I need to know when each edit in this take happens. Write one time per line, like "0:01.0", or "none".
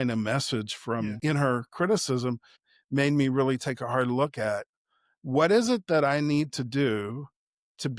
0:01.2
0:02.6